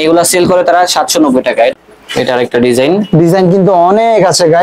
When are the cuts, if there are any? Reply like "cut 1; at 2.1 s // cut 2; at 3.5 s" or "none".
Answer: cut 1; at 1.8 s